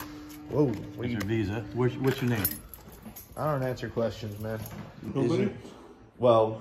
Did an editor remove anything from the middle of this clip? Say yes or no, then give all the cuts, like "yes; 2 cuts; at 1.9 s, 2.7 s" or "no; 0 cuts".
yes; 1 cut; at 5.1 s